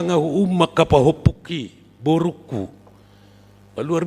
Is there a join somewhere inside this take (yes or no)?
no